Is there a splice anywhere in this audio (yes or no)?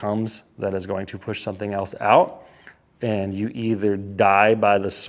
no